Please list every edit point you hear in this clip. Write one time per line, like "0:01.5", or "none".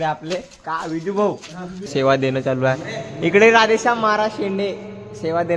0:01.9